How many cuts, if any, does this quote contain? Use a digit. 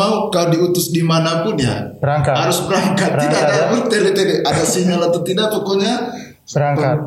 0